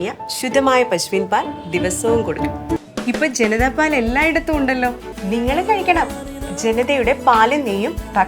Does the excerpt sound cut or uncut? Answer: cut